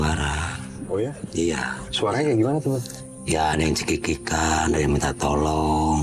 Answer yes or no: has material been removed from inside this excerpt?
no